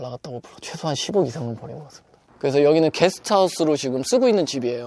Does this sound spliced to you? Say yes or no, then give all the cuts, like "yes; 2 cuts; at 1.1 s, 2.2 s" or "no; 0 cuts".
yes; 1 cut; at 2.3 s